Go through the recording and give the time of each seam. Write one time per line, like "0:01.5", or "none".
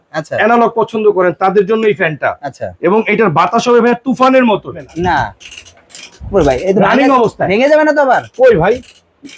0:04.9